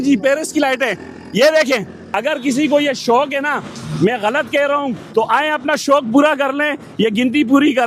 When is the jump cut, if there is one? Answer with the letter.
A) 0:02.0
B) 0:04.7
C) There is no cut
A